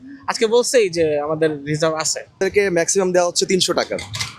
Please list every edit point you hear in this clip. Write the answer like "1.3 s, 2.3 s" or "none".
2.3 s